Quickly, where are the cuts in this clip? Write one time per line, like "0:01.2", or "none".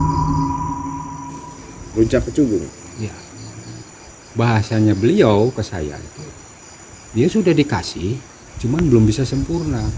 0:01.1
0:03.8